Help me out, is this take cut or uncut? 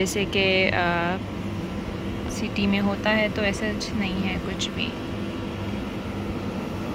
uncut